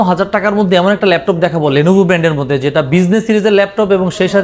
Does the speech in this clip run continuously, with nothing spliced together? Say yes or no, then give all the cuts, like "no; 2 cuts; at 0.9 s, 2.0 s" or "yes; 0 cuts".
yes; 0 cuts